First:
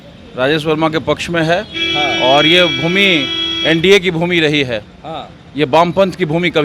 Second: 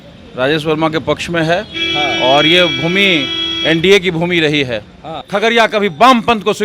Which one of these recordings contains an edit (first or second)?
second